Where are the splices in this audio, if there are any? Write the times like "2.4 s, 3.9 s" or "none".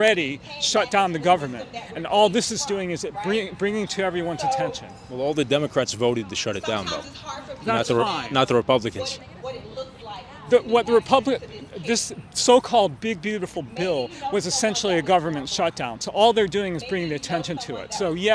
none